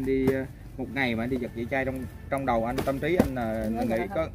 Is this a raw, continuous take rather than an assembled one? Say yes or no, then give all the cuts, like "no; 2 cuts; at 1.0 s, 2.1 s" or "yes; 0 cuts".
yes; 0 cuts